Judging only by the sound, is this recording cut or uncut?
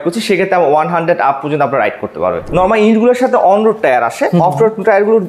cut